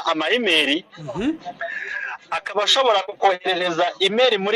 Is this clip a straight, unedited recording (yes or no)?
yes